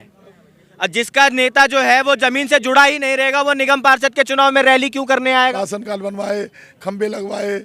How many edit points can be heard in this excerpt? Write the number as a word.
one